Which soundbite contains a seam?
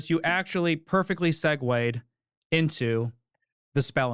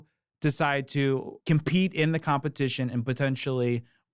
second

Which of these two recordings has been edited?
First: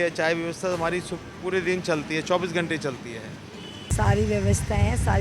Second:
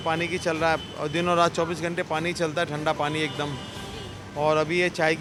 first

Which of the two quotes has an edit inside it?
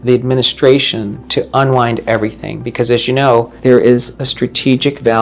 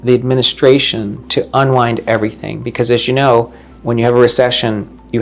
first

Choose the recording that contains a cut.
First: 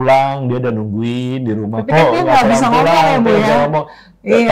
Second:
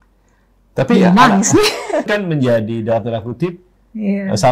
second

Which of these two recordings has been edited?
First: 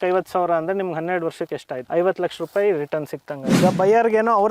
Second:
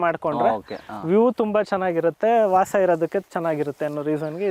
first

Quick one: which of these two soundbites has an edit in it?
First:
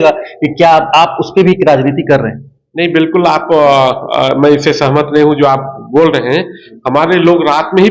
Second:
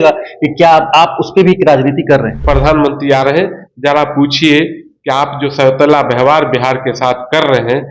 second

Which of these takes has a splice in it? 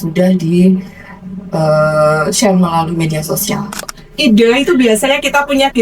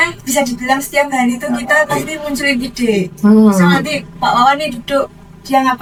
first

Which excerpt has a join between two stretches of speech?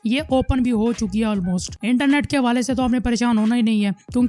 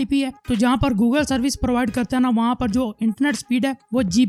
first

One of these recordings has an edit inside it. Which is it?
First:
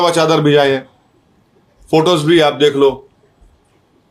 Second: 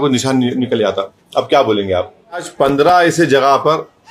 second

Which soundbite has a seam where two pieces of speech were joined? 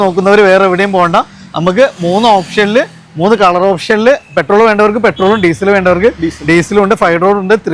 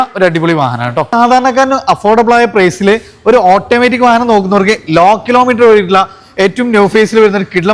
second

